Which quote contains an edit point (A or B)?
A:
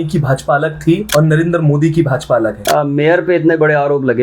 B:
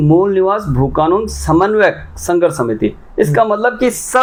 A